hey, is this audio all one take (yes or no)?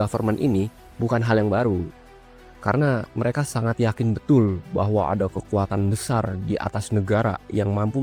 yes